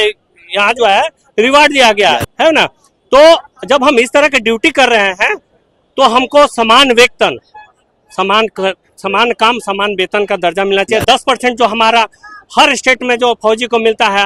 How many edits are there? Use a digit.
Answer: 0